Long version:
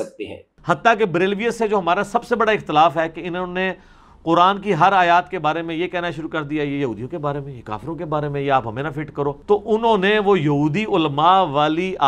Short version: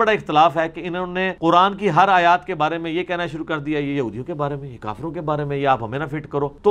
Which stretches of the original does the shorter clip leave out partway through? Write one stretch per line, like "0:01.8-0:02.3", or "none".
0:03.7-0:04.1